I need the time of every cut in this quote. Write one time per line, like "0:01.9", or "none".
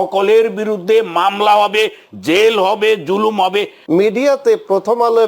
0:03.7